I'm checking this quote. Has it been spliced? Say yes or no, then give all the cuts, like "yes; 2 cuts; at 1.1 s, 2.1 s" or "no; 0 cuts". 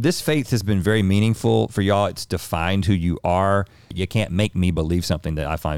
yes; 1 cut; at 3.9 s